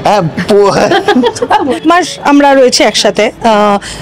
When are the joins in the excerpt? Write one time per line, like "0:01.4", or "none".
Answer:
0:01.8